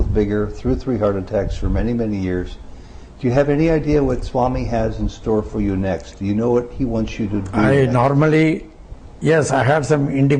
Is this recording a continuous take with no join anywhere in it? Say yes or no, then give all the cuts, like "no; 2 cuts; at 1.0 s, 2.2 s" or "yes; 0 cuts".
yes; 0 cuts